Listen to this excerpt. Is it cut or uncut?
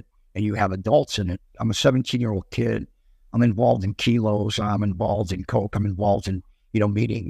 cut